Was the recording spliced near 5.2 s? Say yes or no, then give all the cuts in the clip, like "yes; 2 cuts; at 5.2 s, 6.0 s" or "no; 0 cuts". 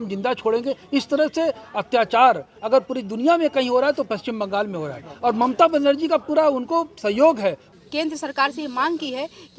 no; 1 cut; at 7.7 s